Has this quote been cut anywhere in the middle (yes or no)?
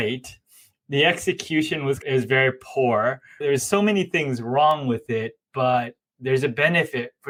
no